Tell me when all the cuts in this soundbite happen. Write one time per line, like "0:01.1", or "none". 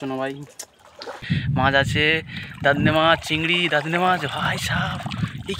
0:01.2